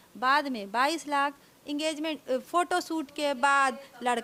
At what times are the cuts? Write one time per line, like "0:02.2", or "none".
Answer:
none